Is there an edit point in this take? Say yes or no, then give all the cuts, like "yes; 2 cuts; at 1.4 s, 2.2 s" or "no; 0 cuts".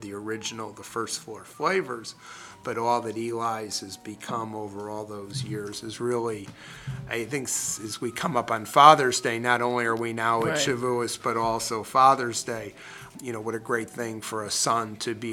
no; 0 cuts